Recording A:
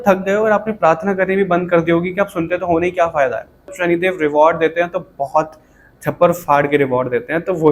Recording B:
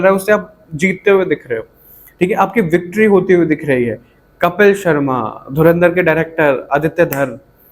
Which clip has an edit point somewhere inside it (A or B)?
A